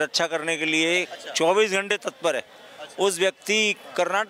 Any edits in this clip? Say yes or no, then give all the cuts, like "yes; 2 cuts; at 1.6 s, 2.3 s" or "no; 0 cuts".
no; 0 cuts